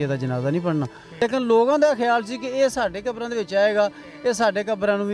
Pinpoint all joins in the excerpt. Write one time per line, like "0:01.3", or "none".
0:01.0